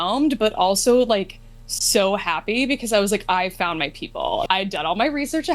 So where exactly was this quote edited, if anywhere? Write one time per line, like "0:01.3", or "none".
0:04.5